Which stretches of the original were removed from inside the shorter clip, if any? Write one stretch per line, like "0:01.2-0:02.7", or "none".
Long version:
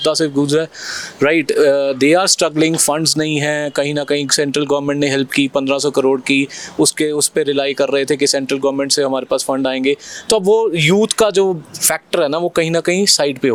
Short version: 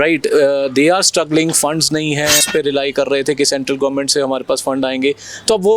0:03.7-0:07.3